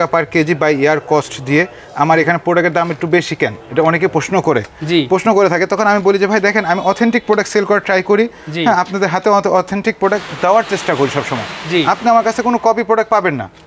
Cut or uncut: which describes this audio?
uncut